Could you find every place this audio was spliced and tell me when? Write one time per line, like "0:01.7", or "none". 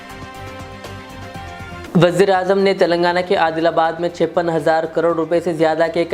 0:01.8